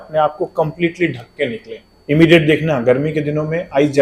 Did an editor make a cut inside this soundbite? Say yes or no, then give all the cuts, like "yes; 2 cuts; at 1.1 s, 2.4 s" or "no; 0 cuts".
yes; 1 cut; at 1.9 s